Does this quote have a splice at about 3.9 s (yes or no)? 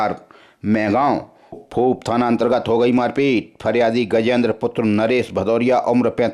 no